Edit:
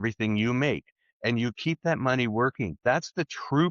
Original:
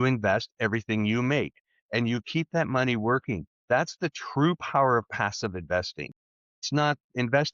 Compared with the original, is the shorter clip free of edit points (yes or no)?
no